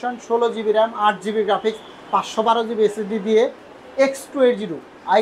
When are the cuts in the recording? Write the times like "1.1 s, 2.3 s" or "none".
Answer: 3.6 s